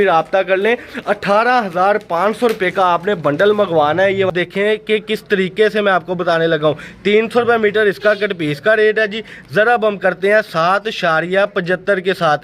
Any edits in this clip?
yes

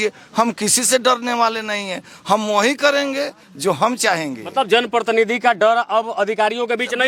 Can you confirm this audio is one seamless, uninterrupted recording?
yes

